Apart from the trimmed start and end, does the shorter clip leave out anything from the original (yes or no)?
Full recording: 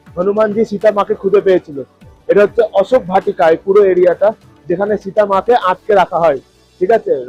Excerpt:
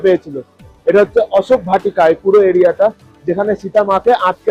no